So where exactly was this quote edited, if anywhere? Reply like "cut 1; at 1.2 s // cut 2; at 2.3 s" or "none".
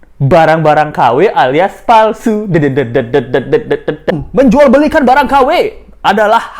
cut 1; at 4.2 s